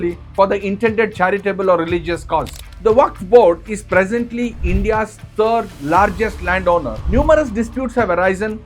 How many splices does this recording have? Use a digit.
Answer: 2